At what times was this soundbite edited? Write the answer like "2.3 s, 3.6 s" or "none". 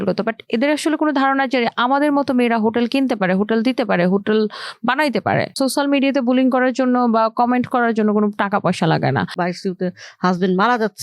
5.5 s, 9.3 s